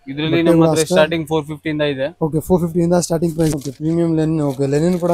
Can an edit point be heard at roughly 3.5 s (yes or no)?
yes